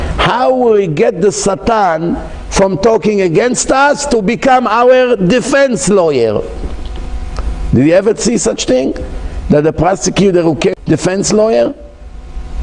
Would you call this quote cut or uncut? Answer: cut